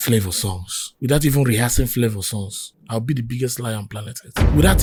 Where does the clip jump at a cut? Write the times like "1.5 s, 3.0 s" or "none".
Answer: none